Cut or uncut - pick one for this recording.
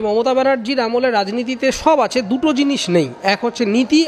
uncut